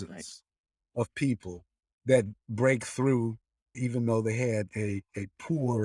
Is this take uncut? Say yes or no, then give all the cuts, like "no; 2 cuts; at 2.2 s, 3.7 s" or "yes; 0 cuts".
no; 1 cut; at 3.7 s